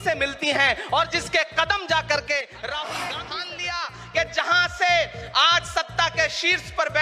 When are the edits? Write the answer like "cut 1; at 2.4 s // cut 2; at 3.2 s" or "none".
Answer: cut 1; at 3.2 s